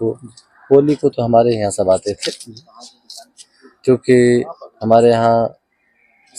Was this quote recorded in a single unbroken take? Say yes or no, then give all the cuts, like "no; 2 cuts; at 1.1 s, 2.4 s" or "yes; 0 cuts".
yes; 0 cuts